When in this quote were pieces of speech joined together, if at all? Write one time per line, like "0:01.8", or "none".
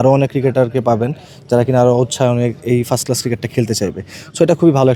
none

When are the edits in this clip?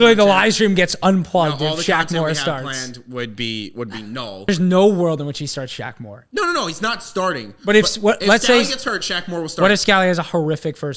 0:04.5

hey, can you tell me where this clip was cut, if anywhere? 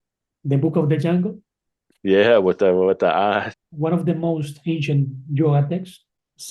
0:03.6

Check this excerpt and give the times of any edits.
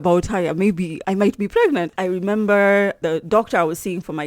0:01.0
0:01.9

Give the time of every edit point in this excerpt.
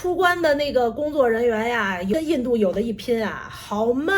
0:02.1

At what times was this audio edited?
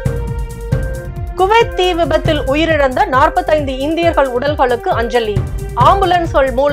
0:01.1

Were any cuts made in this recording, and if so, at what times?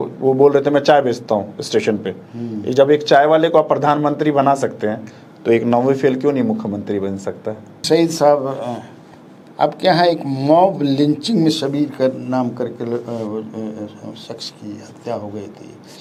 none

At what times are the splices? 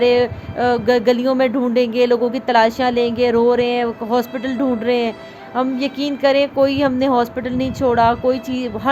none

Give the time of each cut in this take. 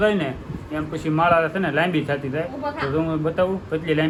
none

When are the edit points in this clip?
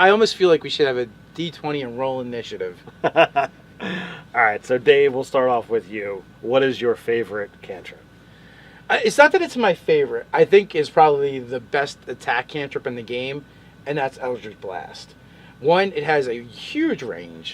0:15.2

